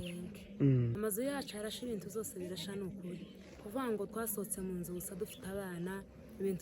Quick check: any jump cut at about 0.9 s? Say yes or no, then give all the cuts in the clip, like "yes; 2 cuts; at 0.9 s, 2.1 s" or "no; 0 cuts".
yes; 1 cut; at 0.9 s